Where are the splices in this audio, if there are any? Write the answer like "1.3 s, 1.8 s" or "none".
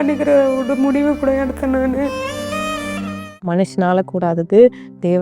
3.4 s